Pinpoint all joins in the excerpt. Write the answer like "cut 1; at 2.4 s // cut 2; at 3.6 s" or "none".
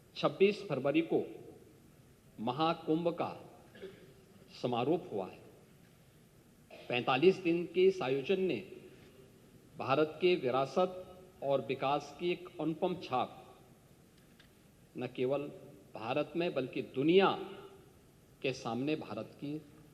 none